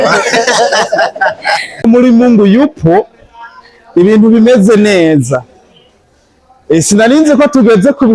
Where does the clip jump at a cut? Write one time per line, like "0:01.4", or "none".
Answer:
0:01.8